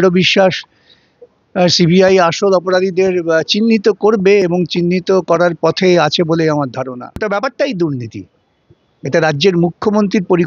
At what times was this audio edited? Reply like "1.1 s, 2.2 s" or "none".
7.2 s